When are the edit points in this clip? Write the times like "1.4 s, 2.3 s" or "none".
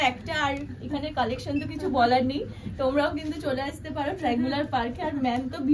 none